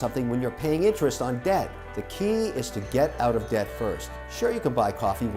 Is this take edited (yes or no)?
no